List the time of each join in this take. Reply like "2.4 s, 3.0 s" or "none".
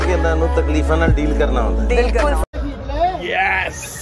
2.4 s